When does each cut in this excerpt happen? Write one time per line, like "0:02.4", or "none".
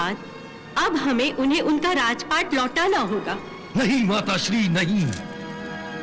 none